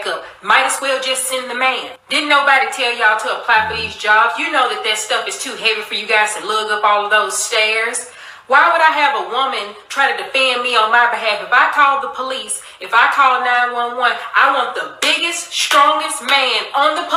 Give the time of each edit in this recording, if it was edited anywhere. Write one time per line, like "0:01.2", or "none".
none